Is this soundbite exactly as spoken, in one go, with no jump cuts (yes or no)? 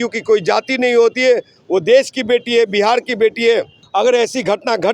yes